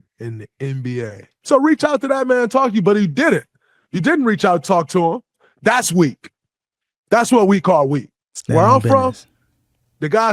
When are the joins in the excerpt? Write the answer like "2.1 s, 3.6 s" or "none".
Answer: 1.3 s